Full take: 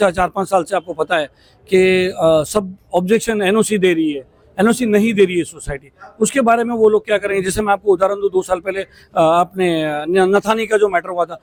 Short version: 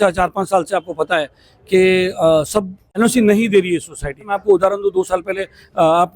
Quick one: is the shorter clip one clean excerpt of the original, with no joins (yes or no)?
no